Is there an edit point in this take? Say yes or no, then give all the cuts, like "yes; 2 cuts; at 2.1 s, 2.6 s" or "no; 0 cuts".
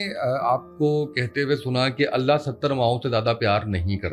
no; 0 cuts